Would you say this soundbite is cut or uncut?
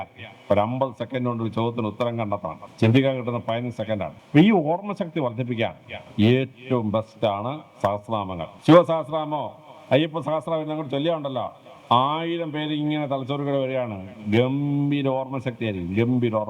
cut